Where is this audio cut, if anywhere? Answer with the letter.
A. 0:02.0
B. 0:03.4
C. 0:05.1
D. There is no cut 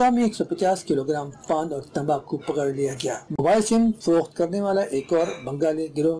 B